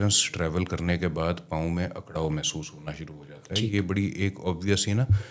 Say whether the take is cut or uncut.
uncut